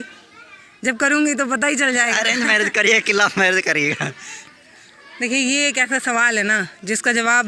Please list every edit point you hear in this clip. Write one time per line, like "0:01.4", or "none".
none